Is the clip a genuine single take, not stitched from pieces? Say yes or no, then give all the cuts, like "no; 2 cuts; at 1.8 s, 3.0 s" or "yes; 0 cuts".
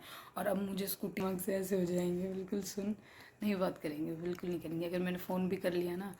no; 1 cut; at 1.2 s